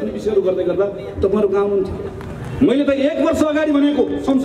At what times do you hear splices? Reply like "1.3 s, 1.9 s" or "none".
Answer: none